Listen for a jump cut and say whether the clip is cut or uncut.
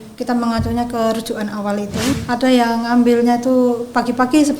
cut